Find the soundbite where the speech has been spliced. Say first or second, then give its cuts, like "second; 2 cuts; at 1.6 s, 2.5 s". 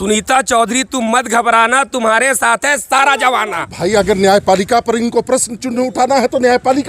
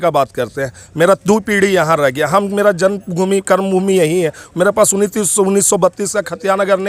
first; 1 cut; at 3.6 s